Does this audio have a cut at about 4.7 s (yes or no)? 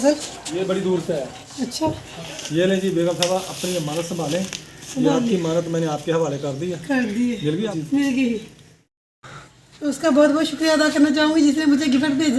no